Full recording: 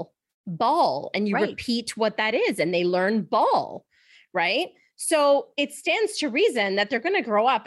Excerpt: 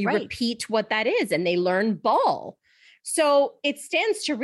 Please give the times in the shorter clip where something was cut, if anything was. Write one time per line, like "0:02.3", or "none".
0:02.9